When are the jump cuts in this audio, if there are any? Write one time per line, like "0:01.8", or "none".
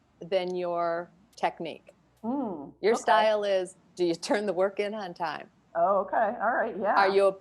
none